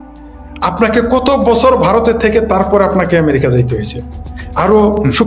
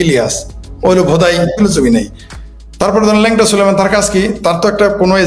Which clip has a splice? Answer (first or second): second